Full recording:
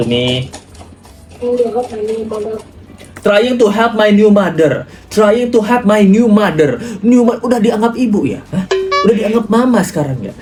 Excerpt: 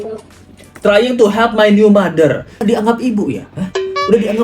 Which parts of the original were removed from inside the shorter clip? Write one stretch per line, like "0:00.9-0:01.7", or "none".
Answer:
0:05.0-0:07.6